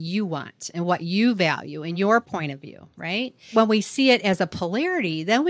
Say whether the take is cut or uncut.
cut